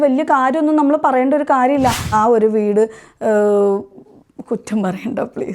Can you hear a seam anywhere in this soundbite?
yes; 1 cut; at 2.1 s

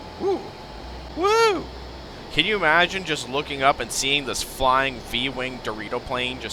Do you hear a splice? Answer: yes; 1 cut; at 1.0 s

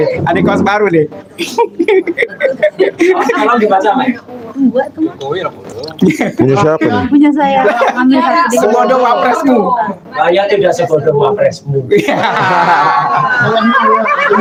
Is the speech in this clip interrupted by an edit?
no; 0 cuts

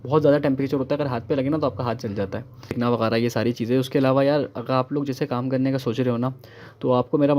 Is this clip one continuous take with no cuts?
no; 1 cut; at 2.8 s

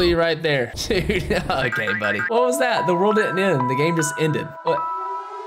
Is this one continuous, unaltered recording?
no; 1 cut; at 2.2 s

